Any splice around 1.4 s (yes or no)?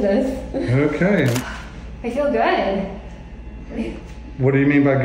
yes